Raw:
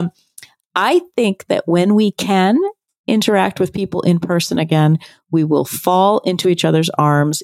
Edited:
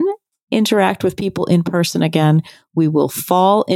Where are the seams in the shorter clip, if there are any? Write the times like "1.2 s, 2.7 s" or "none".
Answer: none